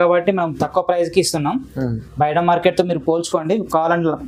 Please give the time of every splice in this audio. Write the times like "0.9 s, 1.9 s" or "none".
none